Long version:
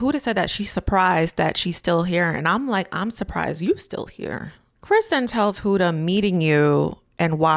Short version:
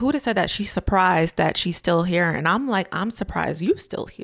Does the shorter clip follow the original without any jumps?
yes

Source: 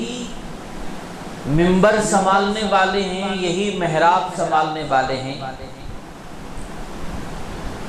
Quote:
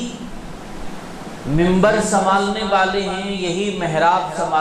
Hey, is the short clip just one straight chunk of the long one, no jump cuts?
yes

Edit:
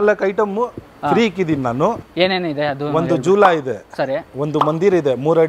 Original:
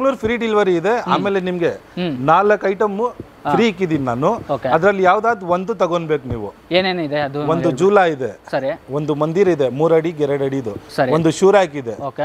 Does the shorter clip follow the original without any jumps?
no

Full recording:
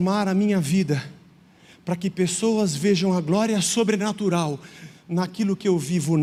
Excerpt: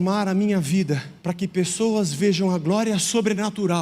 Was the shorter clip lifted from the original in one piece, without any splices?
no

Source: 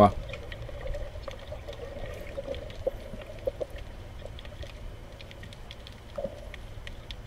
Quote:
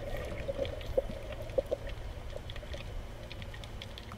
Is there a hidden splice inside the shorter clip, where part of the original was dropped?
no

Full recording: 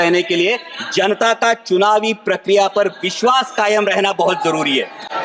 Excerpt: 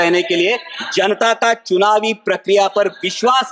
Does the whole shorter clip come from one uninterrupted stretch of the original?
yes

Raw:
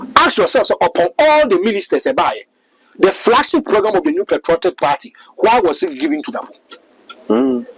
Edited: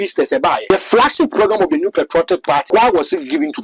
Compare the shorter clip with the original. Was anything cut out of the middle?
yes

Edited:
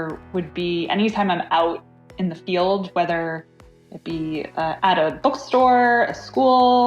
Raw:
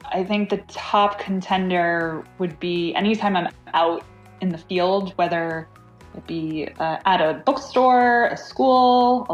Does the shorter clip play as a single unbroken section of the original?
no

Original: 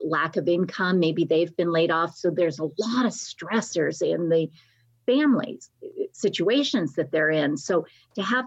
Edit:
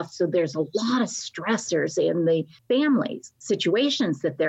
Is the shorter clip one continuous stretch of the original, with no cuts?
no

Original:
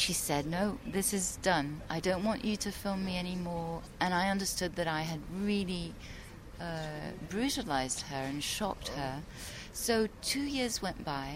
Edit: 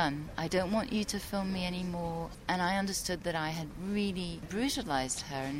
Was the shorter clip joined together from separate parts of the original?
yes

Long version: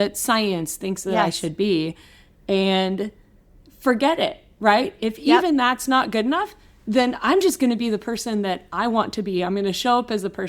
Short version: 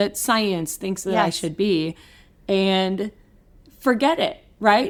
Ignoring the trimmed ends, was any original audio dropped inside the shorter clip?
no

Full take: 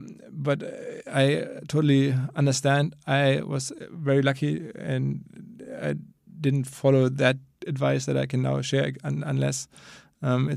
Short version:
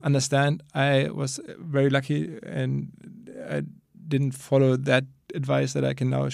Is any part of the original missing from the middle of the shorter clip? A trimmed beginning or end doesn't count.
no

